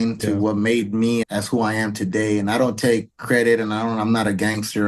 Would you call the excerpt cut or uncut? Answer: cut